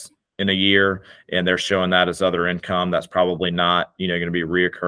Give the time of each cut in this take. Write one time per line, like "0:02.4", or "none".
none